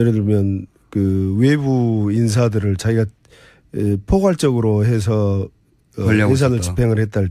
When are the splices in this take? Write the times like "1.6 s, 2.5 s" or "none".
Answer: 4.2 s